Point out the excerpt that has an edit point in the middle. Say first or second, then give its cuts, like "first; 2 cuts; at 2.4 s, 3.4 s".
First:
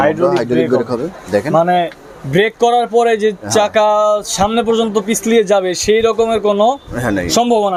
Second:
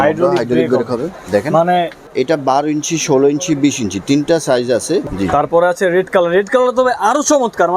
second; 2 cuts; at 2.1 s, 5.0 s